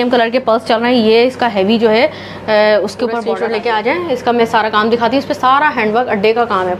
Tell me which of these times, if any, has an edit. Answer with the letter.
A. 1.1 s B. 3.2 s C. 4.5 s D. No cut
B